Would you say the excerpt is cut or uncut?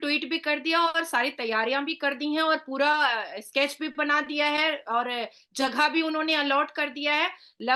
uncut